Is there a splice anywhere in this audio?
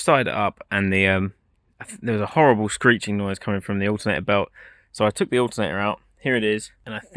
no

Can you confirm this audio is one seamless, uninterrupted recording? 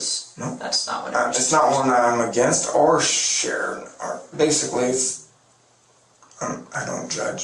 yes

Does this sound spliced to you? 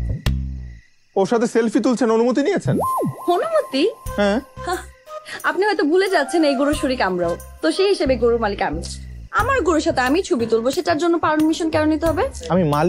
yes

